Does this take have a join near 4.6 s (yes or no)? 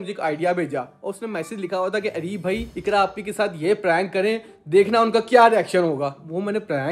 no